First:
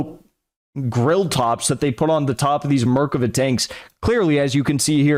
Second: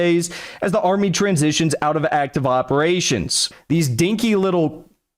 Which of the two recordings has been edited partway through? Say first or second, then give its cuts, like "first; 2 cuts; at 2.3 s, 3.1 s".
second; 1 cut; at 3.5 s